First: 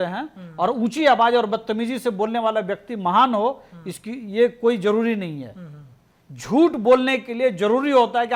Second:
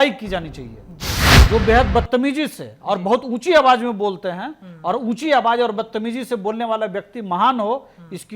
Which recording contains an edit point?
second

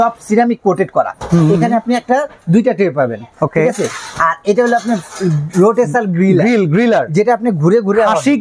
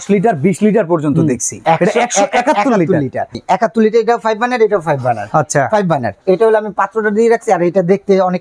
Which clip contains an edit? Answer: second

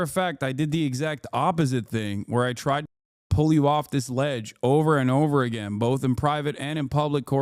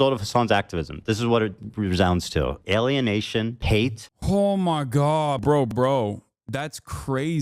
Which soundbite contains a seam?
second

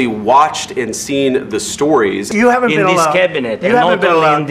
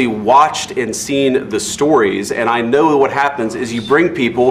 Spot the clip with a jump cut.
first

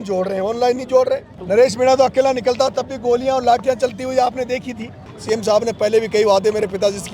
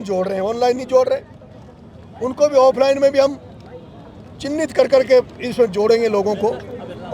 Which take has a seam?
first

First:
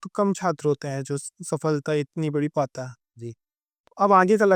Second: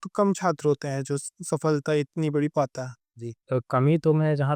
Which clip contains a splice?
second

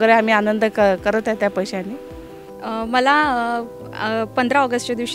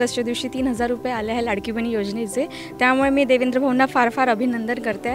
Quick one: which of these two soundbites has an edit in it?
first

